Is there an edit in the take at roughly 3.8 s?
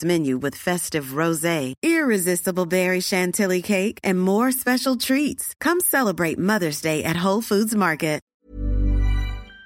no; 1 cut; at 8.2 s

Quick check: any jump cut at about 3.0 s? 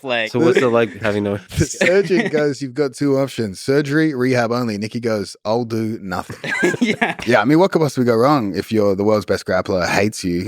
no; 1 cut; at 7.1 s

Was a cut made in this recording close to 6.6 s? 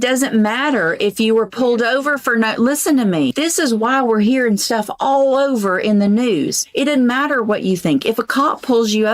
yes; 2 cuts; at 3.3 s, 6.6 s

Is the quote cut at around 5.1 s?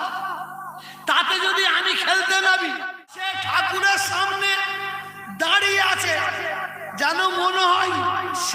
no; 1 cut; at 3.2 s

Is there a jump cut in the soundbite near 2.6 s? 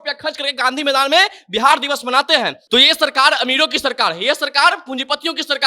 yes; 1 cut; at 2.6 s

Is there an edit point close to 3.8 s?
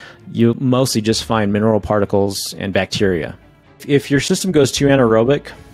yes; 1 cut; at 3.8 s

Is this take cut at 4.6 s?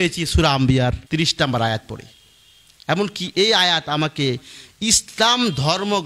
no; 1 cut; at 1.0 s

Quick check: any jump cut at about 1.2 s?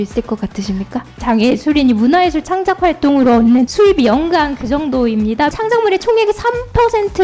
yes; 3 cuts; at 1.2 s, 3.7 s, 5.6 s

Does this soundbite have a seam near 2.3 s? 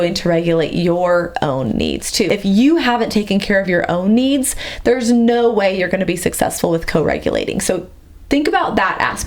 yes; 1 cut; at 2.3 s

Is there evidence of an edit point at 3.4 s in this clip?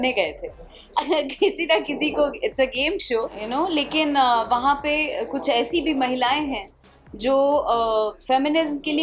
yes; 1 cut; at 3.4 s

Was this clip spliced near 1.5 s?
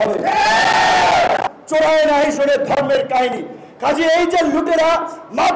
yes; 1 cut; at 1.5 s

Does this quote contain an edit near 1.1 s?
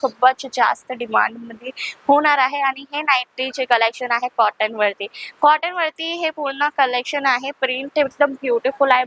no; 0 cuts

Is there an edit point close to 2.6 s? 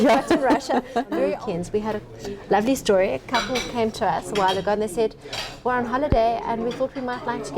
no; 1 cut; at 1.4 s

